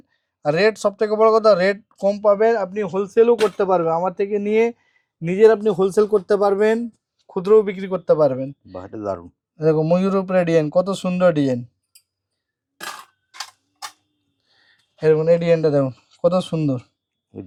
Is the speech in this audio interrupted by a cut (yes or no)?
no